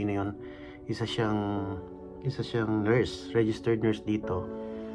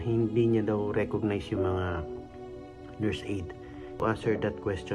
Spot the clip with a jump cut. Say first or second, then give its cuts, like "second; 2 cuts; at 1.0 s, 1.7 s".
second; 1 cut; at 3.9 s